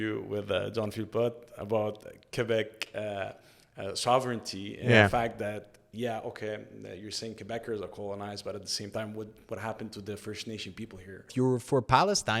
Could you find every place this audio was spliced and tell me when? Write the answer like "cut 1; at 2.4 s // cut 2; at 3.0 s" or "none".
cut 1; at 11.3 s